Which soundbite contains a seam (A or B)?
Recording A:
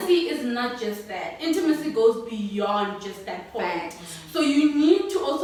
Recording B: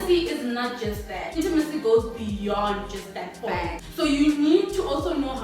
B